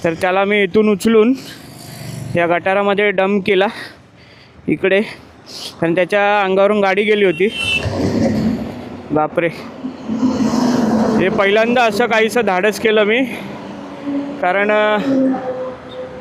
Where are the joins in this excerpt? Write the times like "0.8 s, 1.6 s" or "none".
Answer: none